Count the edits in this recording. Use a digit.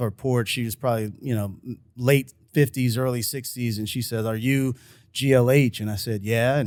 0